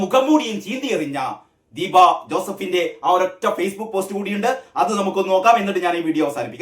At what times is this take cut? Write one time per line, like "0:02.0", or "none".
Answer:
none